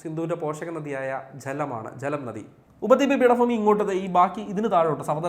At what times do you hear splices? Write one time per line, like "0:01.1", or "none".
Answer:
0:02.6